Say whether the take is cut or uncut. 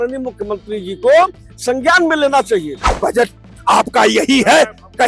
cut